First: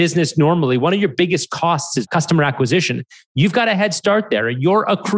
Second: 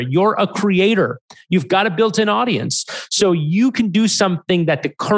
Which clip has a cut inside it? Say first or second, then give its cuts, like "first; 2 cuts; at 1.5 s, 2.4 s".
first; 1 cut; at 2.1 s